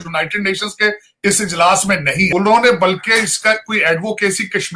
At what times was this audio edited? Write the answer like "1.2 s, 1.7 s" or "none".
2.3 s